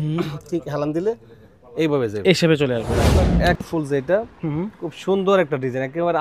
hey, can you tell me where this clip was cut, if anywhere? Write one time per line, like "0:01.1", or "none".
0:03.0

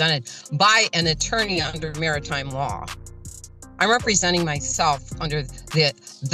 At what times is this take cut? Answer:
none

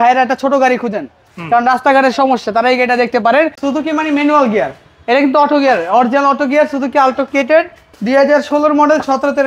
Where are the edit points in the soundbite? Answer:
0:03.6

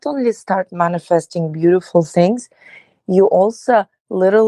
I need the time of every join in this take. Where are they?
none

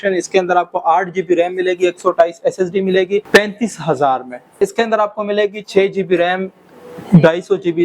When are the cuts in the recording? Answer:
0:03.2
0:04.6

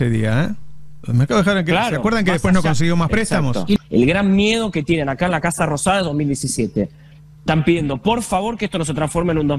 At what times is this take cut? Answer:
0:03.8

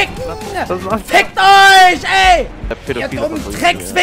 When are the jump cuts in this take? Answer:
none

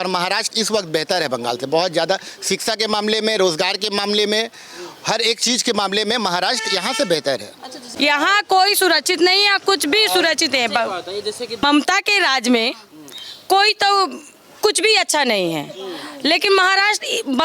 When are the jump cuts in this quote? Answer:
0:07.9
0:11.6

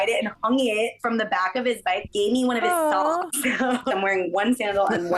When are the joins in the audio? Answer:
0:02.1
0:03.9

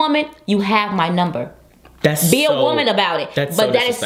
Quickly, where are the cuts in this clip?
none

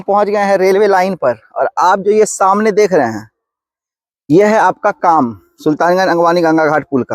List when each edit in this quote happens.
none

